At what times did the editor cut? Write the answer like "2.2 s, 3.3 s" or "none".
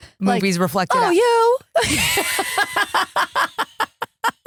none